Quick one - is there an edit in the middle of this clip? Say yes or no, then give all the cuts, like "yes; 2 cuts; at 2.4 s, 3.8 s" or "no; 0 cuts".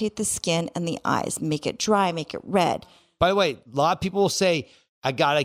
yes; 1 cut; at 3.6 s